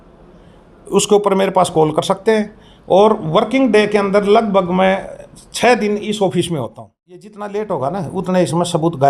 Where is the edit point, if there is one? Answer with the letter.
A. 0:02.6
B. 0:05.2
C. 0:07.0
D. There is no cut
C